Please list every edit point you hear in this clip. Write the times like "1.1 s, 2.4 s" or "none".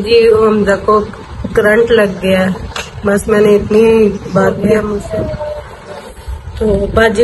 4.7 s